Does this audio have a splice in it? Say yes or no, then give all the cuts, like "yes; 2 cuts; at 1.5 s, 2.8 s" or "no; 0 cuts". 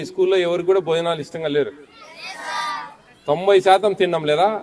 no; 0 cuts